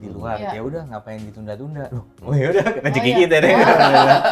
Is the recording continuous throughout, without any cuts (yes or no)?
yes